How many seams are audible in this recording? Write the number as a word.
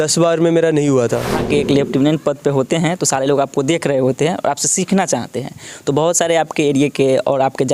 one